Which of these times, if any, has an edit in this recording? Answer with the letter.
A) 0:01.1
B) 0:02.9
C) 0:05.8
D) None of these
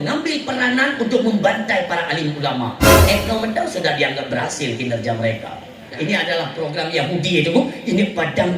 C